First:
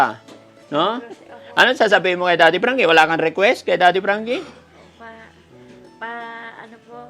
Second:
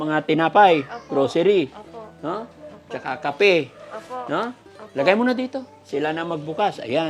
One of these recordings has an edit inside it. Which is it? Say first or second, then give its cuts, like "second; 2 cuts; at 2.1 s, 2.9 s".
first; 1 cut; at 1.4 s